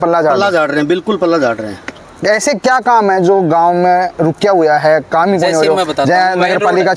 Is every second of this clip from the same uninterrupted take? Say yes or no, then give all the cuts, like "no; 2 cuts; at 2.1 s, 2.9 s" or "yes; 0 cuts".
yes; 0 cuts